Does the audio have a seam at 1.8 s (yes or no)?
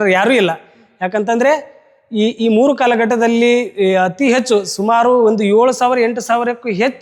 no